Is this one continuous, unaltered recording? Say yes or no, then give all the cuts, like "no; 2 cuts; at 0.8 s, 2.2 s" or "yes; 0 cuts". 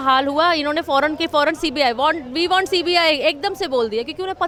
yes; 0 cuts